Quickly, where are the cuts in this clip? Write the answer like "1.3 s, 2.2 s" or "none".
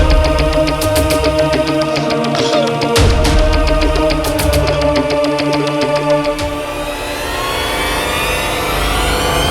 6.0 s